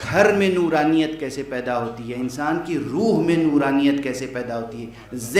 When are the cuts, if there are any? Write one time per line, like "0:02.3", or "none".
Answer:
none